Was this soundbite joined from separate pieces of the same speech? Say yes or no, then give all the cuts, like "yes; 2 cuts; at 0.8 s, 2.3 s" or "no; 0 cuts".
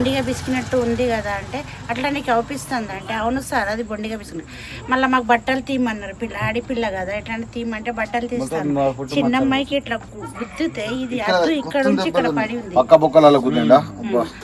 no; 0 cuts